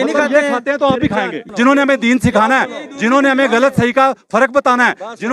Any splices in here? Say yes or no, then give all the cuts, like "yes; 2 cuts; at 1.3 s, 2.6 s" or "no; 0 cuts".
yes; 1 cut; at 1.4 s